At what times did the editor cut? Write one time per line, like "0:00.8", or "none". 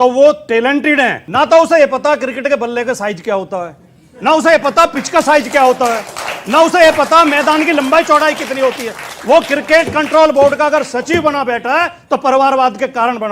0:01.2